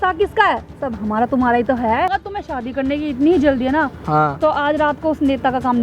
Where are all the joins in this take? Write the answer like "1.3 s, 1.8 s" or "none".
2.1 s